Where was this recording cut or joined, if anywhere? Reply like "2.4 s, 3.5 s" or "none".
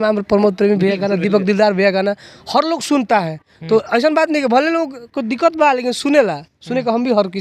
none